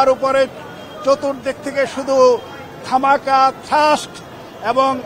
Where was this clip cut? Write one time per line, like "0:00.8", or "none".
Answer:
none